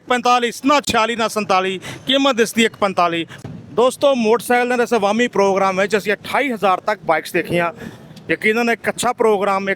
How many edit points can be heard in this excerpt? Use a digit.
1